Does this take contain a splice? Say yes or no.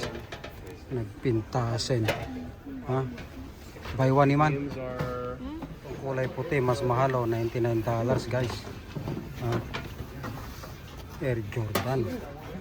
yes